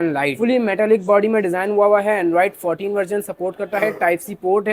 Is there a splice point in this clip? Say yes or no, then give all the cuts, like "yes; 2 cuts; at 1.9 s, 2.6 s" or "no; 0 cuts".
no; 0 cuts